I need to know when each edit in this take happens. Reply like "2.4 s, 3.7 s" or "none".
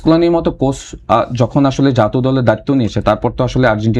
none